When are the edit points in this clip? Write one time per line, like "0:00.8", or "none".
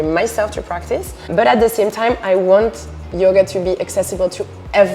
0:01.3